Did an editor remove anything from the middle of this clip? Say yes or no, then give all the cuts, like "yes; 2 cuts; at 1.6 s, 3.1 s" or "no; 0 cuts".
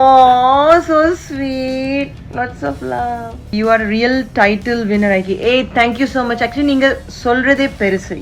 yes; 1 cut; at 3.5 s